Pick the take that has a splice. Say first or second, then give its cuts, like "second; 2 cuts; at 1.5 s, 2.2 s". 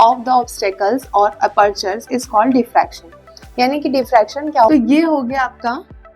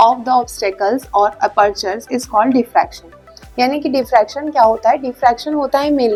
first; 1 cut; at 4.7 s